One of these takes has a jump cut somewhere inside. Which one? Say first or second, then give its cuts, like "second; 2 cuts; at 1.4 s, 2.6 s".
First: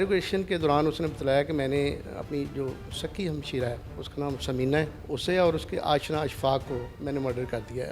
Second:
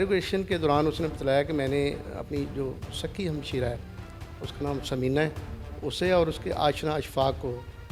first; 3 cuts; at 3.9 s, 5.0 s, 6.9 s